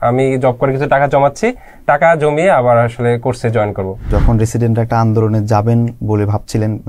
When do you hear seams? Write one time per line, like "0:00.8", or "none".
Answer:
0:04.1